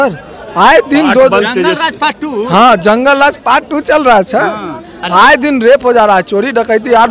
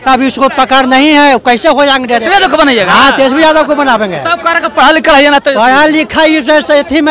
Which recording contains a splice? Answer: second; 1 cut; at 2.2 s

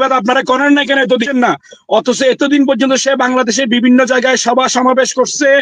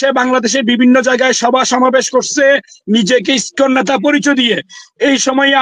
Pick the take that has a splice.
first; 1 cut; at 1.2 s

